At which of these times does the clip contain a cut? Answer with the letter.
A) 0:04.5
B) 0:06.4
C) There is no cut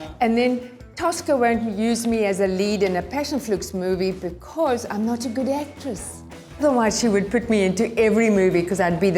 B